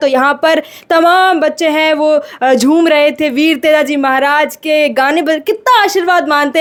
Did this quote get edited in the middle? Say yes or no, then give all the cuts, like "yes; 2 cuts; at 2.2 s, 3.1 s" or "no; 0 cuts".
no; 0 cuts